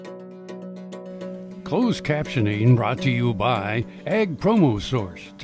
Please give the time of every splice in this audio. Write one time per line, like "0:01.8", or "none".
0:01.7